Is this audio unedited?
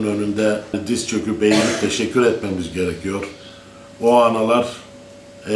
yes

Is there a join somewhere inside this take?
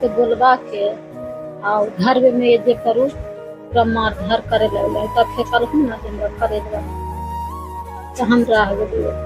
yes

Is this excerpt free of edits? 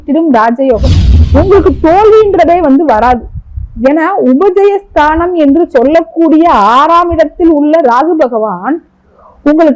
no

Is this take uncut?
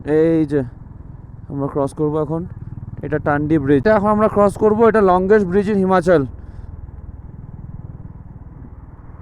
no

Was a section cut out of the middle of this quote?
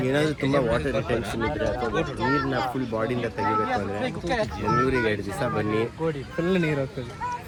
no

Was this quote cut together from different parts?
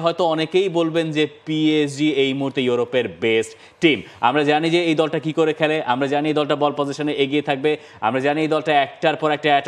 no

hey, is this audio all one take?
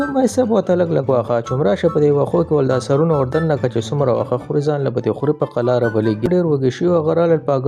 no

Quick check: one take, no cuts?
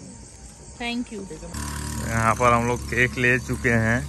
no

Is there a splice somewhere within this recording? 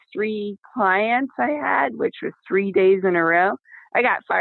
no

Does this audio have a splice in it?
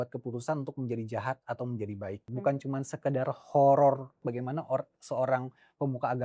yes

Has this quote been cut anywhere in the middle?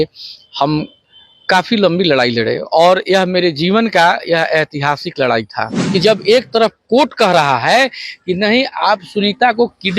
yes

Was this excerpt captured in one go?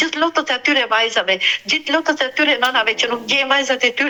yes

